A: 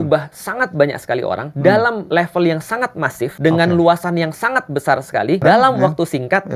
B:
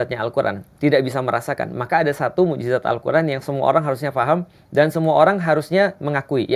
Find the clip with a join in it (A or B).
A